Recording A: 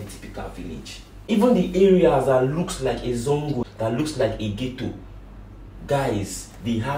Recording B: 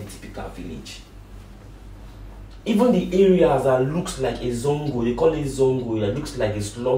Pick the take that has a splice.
A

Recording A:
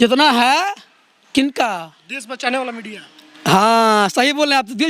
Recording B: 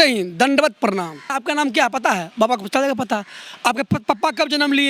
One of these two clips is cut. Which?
B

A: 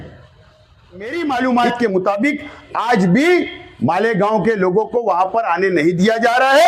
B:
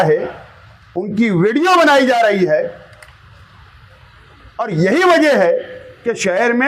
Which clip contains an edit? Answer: A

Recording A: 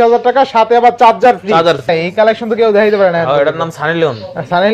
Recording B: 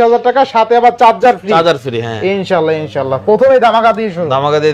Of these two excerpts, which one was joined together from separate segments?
A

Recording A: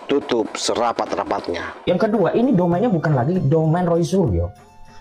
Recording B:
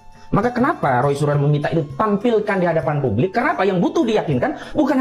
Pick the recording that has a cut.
A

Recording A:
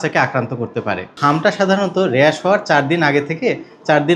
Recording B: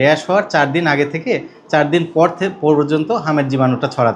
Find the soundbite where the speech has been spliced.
A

